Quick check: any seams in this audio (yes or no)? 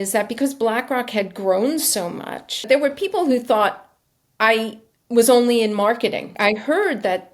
yes